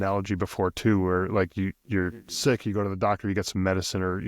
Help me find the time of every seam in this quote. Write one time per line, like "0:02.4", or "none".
none